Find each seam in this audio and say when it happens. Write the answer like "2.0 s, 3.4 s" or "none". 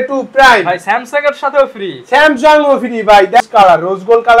3.5 s